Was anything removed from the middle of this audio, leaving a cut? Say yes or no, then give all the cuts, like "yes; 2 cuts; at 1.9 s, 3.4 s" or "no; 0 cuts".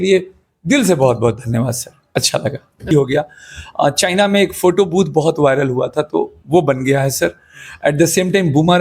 yes; 1 cut; at 2.9 s